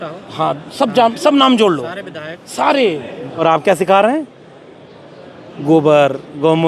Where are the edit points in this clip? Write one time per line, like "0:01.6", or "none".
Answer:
0:03.2